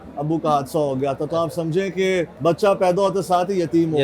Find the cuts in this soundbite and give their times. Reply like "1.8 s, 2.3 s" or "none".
2.3 s

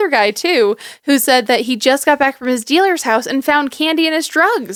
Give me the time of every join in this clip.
none

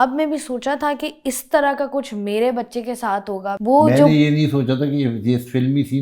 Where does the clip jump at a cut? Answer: 3.6 s

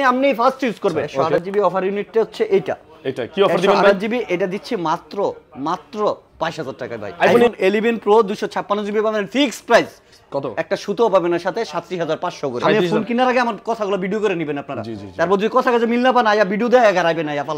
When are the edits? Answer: 1.2 s, 7.5 s, 12.8 s

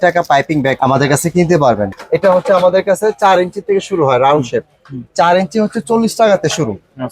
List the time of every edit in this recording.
2.0 s

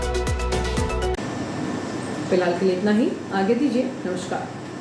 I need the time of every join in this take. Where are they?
none

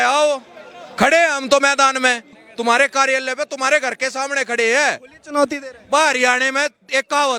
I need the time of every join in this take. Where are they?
2.4 s

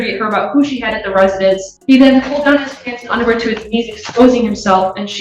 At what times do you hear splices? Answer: 1.7 s

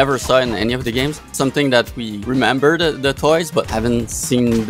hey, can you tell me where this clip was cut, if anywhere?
1.3 s, 2.1 s, 3.7 s

